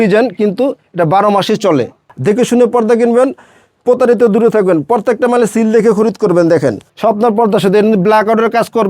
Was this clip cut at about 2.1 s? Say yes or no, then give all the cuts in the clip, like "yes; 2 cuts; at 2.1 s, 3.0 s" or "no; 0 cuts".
yes; 2 cuts; at 2.1 s, 6.9 s